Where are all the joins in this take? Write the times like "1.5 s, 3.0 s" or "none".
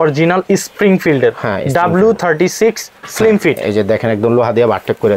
none